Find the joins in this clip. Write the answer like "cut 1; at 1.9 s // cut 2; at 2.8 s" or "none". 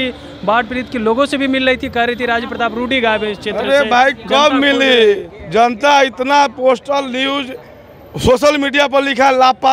none